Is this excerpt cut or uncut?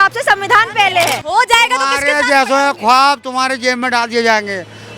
cut